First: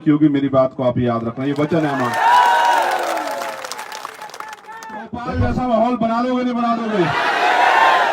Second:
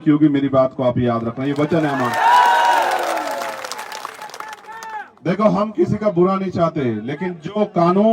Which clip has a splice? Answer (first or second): first